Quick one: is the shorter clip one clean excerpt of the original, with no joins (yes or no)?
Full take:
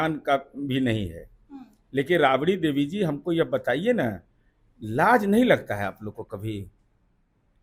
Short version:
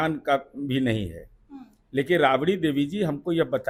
yes